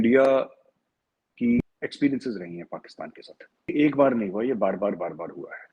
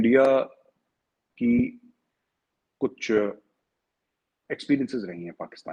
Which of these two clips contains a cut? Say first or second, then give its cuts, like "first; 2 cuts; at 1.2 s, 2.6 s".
first; 2 cuts; at 1.6 s, 3.7 s